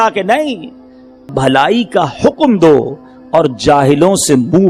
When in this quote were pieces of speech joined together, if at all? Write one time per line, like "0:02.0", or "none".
0:01.3